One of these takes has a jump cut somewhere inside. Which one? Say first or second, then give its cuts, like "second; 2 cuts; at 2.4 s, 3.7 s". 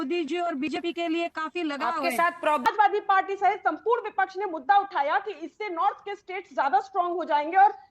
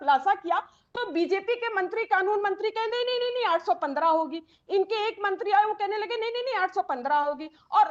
first; 1 cut; at 2.6 s